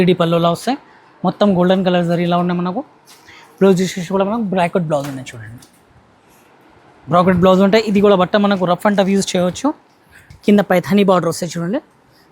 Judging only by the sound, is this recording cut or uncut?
cut